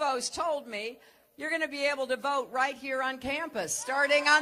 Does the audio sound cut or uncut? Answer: uncut